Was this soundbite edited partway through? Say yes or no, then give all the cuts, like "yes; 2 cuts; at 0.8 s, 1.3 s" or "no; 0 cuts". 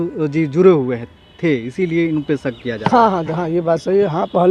no; 0 cuts